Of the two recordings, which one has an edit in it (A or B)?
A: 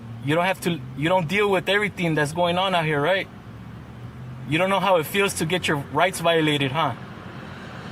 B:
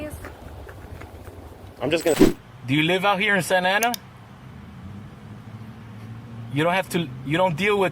B